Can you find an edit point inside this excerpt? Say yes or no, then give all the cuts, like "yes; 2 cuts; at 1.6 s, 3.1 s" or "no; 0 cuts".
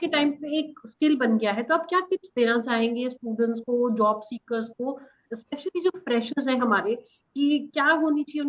no; 0 cuts